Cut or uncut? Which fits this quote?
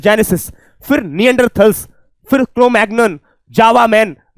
uncut